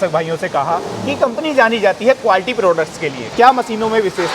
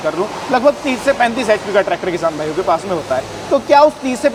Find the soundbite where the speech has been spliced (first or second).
first